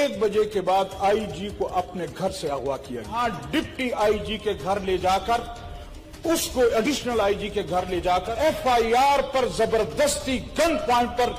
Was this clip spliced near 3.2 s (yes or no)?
yes